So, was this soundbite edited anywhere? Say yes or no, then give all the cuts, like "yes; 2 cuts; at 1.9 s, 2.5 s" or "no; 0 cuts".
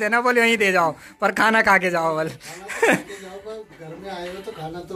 no; 0 cuts